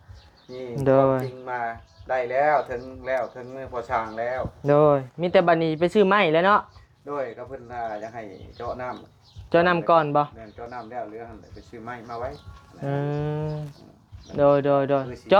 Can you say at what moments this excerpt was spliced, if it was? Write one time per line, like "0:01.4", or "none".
none